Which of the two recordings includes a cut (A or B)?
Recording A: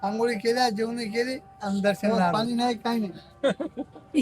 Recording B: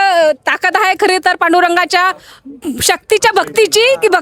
A